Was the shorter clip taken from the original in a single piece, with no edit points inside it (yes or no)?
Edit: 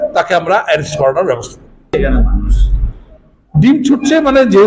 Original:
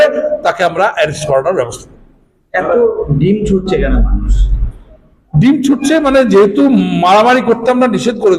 no